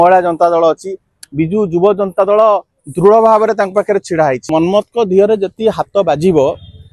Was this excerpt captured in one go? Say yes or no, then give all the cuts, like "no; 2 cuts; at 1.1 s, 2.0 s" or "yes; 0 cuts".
no; 1 cut; at 4.4 s